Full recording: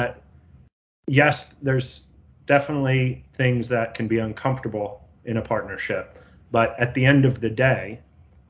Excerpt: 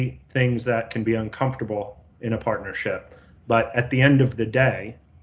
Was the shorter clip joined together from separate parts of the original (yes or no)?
no